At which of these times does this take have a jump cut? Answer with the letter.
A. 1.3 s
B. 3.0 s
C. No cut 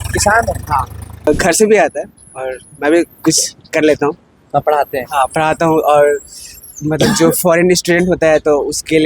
A